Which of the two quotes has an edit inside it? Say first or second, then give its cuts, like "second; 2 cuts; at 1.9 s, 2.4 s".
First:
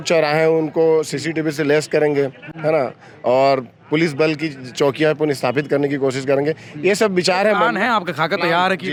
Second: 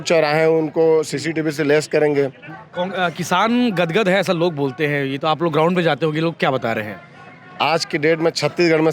second; 1 cut; at 2.5 s